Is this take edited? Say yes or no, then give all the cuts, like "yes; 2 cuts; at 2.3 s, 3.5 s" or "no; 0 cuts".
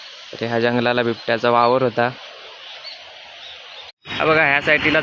yes; 1 cut; at 4.0 s